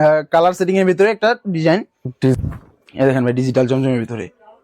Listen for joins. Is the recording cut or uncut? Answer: cut